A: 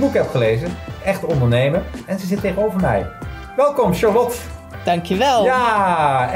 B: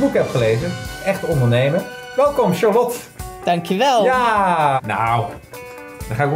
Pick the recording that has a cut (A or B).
B